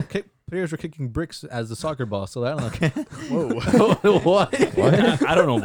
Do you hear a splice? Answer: no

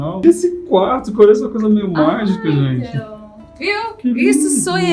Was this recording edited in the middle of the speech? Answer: no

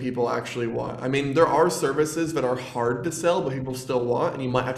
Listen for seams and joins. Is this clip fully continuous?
yes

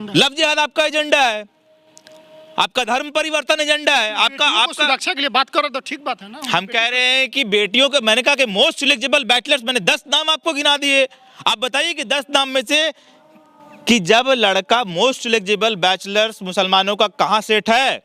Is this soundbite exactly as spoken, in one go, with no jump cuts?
yes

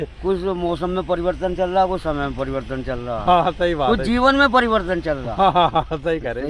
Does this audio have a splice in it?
no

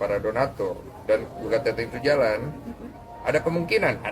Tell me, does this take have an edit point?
no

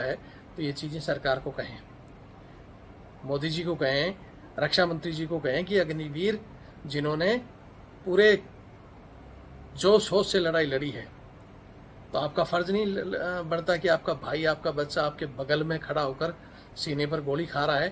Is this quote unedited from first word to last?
yes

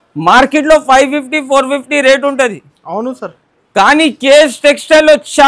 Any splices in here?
no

